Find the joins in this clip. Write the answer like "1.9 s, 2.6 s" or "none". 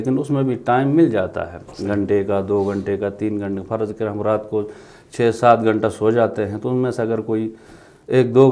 none